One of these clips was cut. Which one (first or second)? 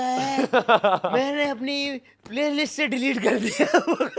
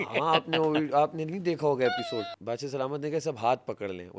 second